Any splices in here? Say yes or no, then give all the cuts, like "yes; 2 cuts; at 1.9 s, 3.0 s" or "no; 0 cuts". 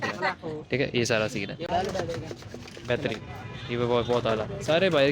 yes; 1 cut; at 1.7 s